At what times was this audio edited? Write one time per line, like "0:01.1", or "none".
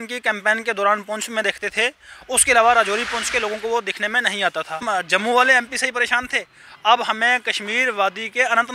0:04.8